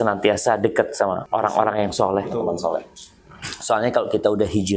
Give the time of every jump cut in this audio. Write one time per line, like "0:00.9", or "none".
0:01.2